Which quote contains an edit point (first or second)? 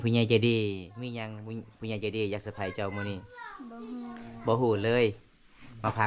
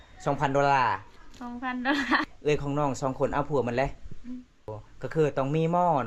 second